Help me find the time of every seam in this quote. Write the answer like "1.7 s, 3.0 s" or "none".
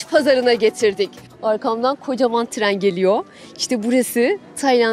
1.2 s